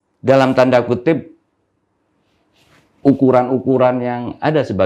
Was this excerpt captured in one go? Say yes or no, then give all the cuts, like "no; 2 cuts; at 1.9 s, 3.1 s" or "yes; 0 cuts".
yes; 0 cuts